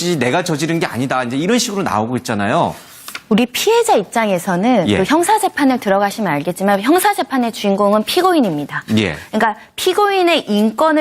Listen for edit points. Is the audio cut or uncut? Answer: cut